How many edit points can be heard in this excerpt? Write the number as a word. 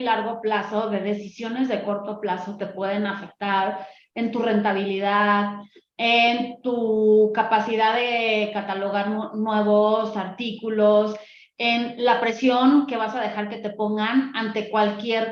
zero